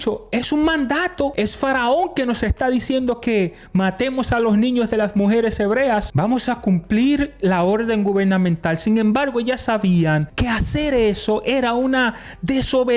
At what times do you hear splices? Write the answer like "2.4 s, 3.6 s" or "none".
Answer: 1.3 s, 6.1 s, 10.3 s

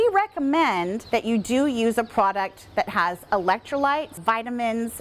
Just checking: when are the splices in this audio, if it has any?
1.0 s

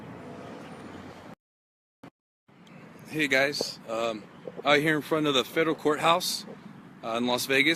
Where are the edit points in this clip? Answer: none

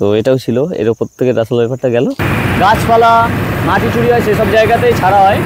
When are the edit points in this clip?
2.2 s

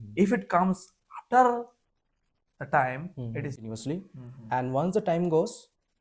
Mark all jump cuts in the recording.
3.6 s

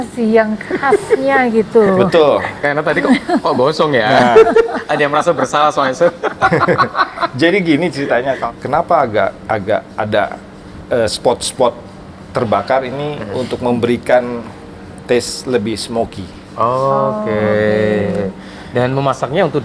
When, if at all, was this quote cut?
8.4 s

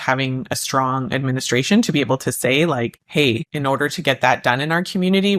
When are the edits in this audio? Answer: 3.2 s

